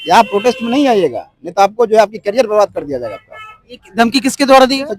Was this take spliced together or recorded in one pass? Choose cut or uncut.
uncut